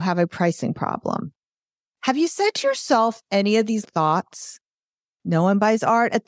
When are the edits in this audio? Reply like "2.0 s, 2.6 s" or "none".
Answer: 3.8 s